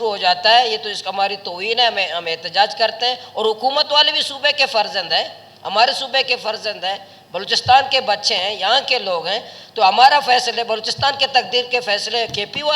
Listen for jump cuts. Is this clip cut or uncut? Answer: uncut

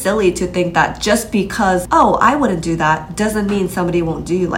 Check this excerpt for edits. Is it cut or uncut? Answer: cut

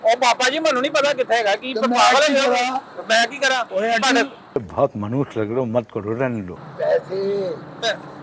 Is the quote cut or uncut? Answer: cut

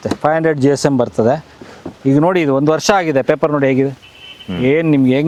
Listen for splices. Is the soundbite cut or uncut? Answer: uncut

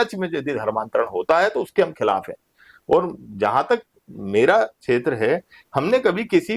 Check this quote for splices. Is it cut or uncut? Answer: uncut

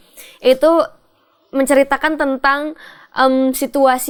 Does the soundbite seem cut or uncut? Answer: uncut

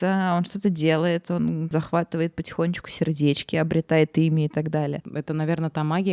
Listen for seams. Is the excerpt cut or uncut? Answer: cut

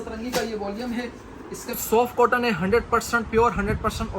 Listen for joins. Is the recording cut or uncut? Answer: cut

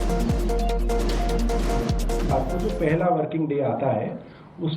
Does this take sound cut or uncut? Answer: cut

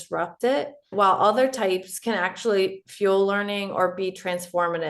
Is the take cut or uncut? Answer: cut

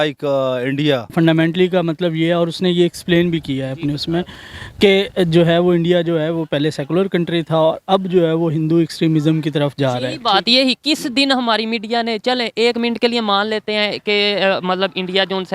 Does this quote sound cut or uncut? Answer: cut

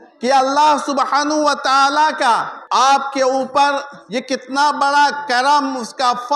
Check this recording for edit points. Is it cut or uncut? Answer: cut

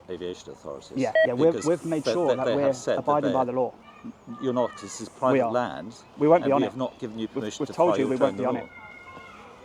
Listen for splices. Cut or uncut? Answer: uncut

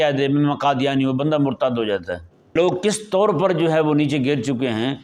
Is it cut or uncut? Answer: cut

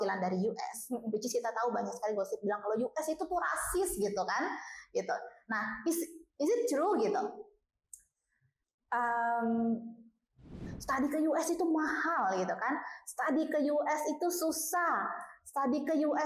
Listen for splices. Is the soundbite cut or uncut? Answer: cut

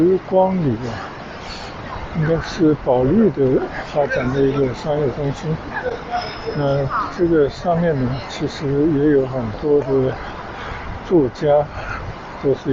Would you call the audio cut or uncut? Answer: uncut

